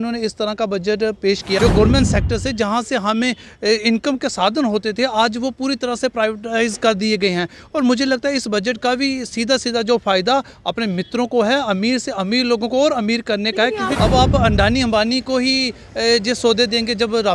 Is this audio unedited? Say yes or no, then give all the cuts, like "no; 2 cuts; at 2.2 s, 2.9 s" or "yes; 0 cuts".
no; 2 cuts; at 1.6 s, 13.9 s